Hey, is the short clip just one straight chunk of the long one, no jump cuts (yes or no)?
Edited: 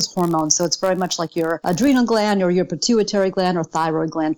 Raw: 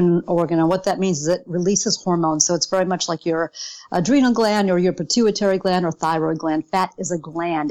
no